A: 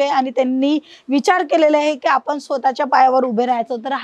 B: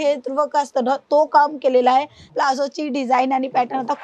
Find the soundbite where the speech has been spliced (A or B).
B